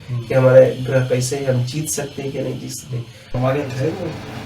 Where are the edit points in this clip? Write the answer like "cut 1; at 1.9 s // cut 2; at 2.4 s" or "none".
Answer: cut 1; at 3.4 s